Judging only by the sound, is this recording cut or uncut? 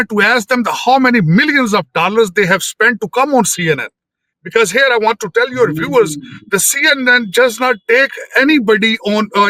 uncut